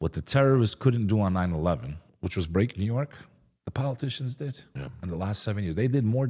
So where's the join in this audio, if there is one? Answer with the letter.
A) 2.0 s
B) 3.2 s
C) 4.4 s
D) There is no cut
A